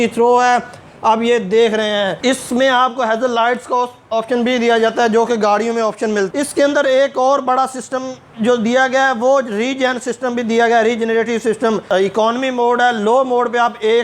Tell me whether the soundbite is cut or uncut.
cut